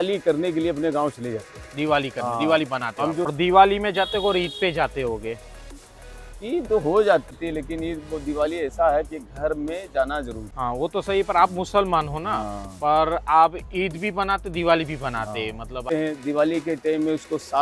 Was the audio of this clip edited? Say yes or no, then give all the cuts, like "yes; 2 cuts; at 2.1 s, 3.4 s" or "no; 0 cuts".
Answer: yes; 4 cuts; at 3.3 s, 7.4 s, 10.4 s, 15.8 s